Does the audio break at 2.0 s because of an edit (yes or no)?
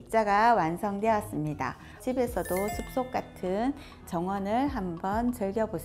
yes